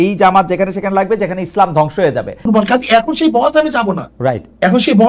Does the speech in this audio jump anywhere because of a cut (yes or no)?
yes